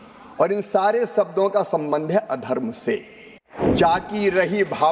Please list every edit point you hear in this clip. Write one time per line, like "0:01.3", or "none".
0:03.7